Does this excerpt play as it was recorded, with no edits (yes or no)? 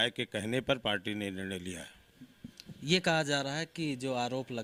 yes